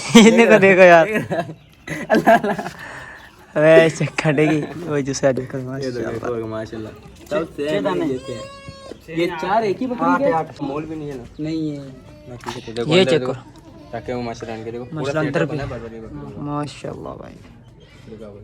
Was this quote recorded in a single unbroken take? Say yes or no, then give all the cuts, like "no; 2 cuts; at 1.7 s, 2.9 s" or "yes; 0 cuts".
no; 1 cut; at 10.6 s